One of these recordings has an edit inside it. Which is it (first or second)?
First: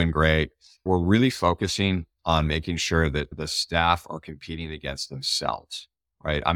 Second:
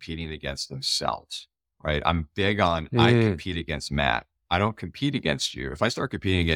first